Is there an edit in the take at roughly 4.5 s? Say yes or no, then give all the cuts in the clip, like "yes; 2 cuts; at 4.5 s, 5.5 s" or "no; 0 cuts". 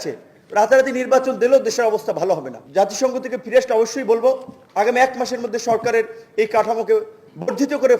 no; 1 cut; at 2.6 s